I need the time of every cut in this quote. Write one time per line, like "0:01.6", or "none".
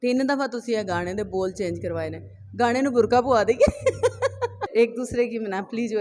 0:04.6